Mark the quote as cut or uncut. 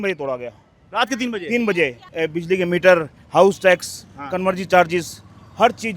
cut